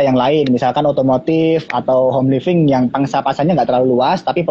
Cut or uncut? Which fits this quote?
uncut